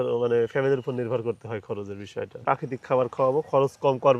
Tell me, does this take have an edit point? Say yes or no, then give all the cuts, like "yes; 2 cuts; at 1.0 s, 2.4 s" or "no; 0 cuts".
yes; 1 cut; at 2.4 s